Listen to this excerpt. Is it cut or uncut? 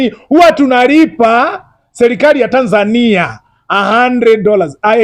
uncut